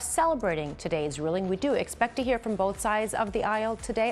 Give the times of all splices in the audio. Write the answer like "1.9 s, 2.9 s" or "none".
none